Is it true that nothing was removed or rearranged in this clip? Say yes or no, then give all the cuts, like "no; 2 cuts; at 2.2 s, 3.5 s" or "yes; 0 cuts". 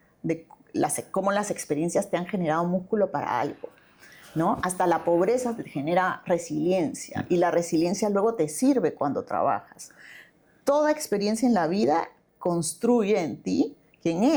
yes; 0 cuts